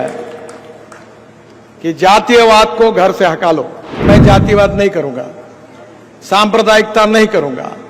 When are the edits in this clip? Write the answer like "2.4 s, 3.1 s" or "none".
4.0 s